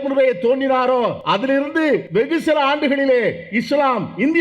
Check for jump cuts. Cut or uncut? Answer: cut